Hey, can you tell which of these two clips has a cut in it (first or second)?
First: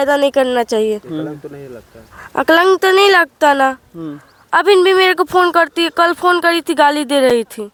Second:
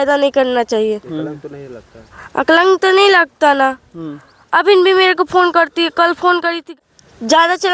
second